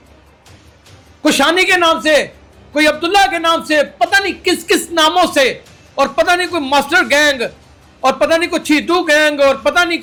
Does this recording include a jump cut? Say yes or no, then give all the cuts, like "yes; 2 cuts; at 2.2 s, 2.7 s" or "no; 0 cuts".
no; 0 cuts